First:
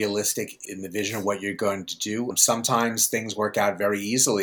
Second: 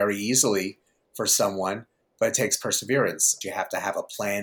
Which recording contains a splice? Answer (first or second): second